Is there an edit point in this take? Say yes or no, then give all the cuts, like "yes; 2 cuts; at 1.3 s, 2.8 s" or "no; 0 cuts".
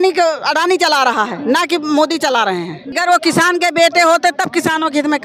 yes; 1 cut; at 2.9 s